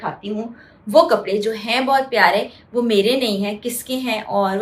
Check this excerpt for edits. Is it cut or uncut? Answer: uncut